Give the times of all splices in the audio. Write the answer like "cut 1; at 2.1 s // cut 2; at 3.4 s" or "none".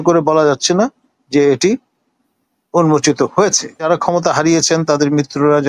cut 1; at 3.9 s